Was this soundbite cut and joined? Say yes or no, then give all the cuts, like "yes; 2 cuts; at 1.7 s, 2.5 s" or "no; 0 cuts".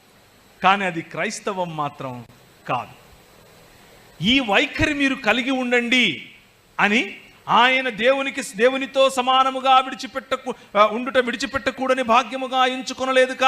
yes; 1 cut; at 12.0 s